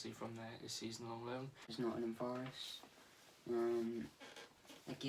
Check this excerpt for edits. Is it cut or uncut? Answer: cut